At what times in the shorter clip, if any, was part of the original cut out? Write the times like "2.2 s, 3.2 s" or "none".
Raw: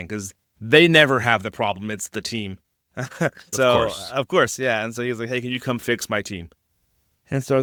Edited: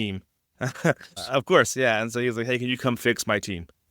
1.1 s